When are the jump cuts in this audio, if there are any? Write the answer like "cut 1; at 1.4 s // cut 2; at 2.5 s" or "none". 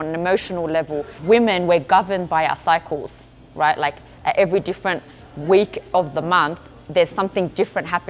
cut 1; at 1.2 s